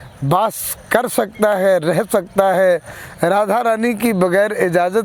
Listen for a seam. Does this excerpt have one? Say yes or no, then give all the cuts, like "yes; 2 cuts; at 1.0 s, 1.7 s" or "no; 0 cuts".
no; 0 cuts